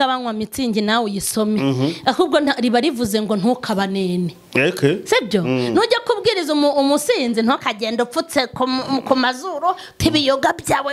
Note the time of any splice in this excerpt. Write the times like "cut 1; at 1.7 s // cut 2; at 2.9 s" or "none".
none